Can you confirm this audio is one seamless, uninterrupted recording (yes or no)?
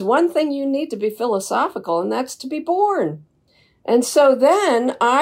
yes